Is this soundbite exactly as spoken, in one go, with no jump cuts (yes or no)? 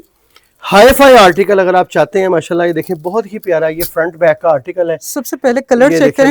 yes